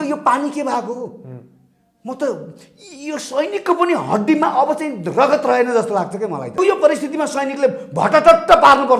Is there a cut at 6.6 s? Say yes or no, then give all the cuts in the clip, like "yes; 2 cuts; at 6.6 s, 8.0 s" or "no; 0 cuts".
yes; 1 cut; at 6.6 s